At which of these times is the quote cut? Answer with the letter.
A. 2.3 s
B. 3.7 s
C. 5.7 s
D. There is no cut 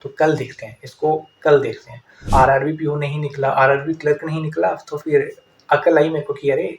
A